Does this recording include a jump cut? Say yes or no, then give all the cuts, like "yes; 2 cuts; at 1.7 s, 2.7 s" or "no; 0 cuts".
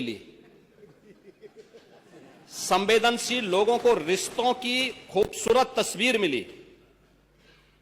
no; 0 cuts